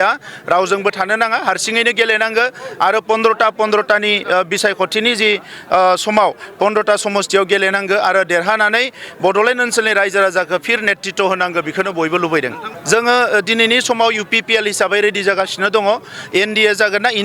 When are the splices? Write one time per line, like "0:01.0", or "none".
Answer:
0:12.7